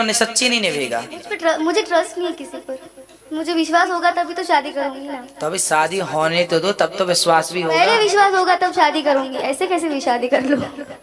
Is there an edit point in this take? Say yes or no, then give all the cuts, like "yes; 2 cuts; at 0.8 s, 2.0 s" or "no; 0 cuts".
no; 0 cuts